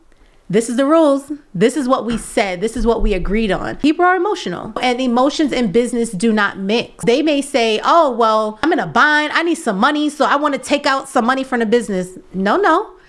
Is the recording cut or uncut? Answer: cut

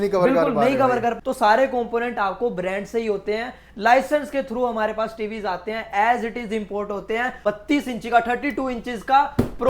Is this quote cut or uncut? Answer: cut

